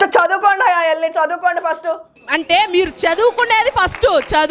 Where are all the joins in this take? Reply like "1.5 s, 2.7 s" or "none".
none